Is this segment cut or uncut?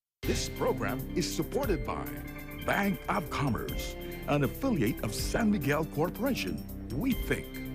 uncut